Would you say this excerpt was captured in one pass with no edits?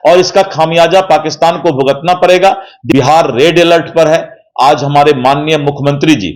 no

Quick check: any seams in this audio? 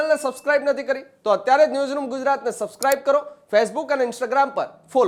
no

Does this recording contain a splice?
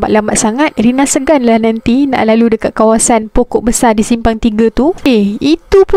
yes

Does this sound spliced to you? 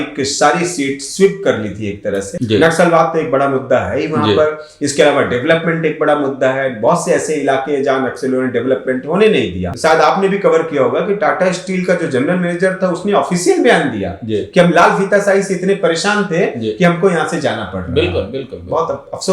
yes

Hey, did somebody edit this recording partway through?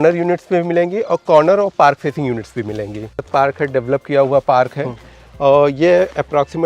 yes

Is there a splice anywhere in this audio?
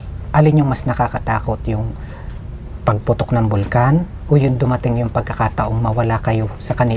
no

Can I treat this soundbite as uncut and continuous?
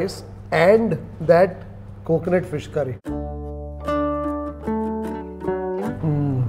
yes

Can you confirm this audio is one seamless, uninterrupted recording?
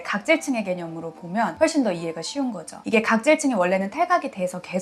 no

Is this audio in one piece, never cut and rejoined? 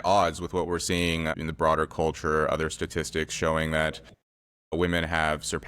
no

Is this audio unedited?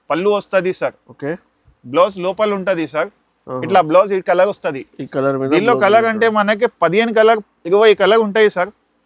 yes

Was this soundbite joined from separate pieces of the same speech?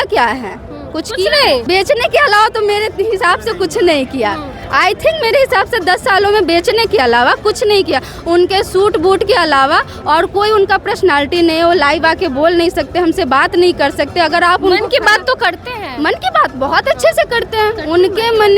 no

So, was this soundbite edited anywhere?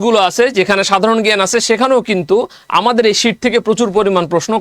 no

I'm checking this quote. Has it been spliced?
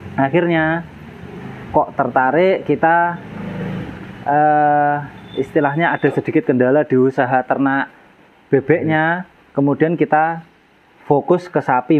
no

